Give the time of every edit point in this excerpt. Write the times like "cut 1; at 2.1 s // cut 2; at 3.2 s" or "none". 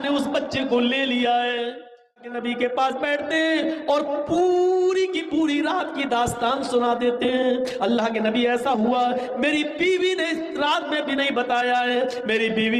cut 1; at 2.2 s